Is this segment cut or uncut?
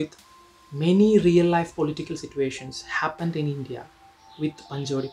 uncut